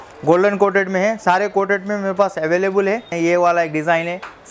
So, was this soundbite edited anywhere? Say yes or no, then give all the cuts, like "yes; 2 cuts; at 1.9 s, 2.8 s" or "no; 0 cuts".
yes; 1 cut; at 3.1 s